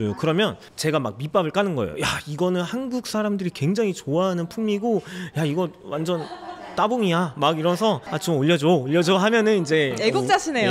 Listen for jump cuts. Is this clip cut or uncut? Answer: cut